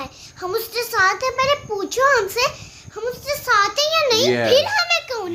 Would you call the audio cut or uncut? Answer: uncut